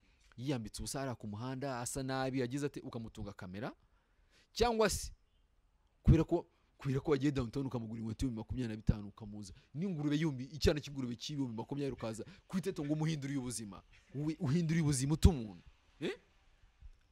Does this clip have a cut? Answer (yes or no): no